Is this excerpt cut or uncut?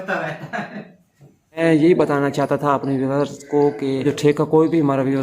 cut